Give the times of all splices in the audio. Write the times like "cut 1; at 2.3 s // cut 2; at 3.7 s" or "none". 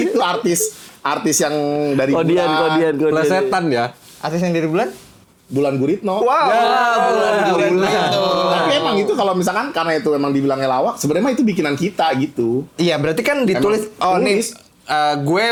none